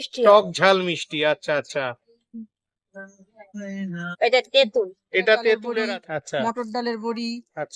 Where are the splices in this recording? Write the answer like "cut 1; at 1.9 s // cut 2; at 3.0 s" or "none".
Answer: cut 1; at 5.7 s